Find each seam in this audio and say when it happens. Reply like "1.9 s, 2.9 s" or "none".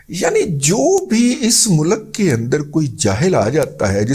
none